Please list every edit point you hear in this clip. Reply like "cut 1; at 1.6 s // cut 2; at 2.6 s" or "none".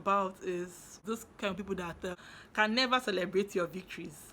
cut 1; at 1.0 s // cut 2; at 2.2 s